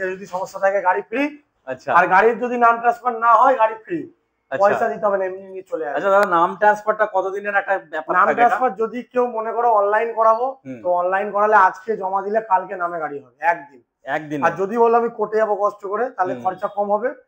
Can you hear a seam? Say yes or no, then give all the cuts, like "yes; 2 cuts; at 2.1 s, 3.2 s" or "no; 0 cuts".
no; 0 cuts